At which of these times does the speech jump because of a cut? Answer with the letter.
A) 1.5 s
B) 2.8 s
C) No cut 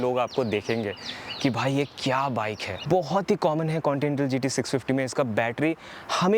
B